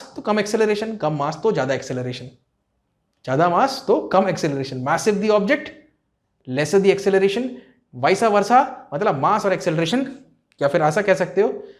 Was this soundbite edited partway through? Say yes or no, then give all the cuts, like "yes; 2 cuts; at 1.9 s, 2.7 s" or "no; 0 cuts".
no; 0 cuts